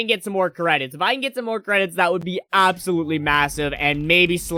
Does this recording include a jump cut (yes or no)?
no